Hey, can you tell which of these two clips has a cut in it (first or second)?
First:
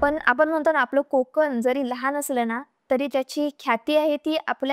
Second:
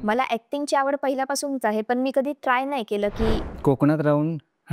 second